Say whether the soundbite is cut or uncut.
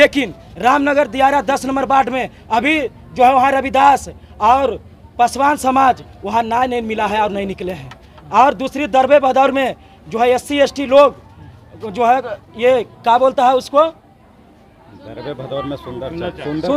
uncut